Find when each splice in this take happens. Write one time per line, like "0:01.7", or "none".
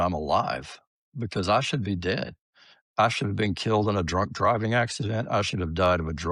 none